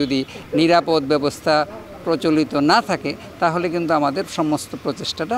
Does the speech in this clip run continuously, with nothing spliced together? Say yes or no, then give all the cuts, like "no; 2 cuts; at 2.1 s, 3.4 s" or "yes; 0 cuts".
yes; 0 cuts